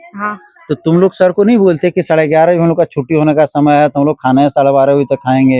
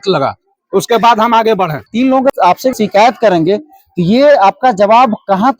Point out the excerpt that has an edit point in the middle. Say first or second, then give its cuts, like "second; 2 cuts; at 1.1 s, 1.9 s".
second; 1 cut; at 1.8 s